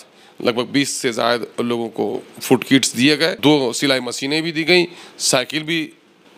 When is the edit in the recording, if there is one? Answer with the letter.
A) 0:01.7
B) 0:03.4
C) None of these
B